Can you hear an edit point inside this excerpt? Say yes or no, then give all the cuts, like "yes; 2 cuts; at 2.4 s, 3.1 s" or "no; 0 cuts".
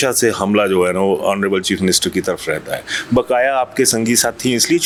no; 0 cuts